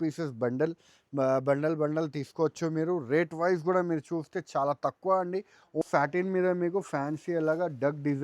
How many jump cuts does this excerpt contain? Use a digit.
1